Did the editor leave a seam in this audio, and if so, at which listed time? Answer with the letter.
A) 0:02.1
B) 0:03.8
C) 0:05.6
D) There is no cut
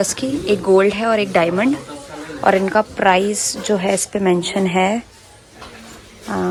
D